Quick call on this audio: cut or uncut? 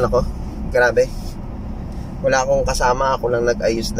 uncut